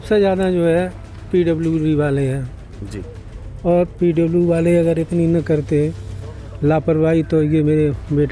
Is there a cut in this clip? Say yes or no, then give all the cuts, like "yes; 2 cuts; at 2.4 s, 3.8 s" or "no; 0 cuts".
no; 0 cuts